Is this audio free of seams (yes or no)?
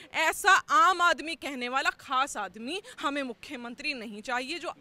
yes